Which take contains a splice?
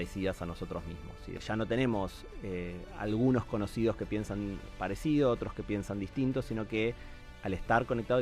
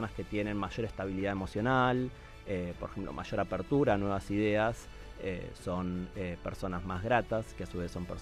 first; 1 cut; at 1.3 s

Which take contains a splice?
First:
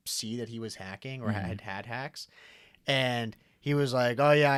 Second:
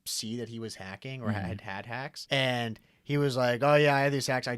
second; 1 cut; at 2.2 s

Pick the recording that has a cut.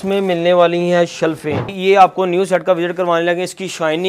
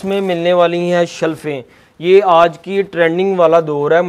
first; 1 cut; at 1.7 s

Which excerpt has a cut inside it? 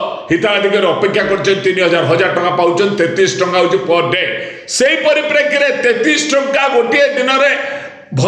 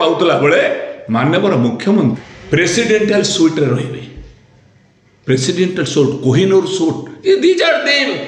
second; 1 cut; at 2.2 s

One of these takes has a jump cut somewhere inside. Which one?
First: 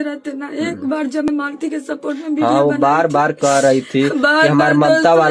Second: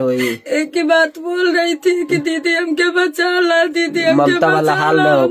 first; 1 cut; at 1.3 s

